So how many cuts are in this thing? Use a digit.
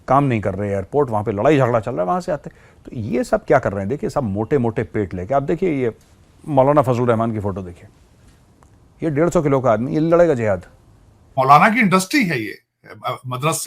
1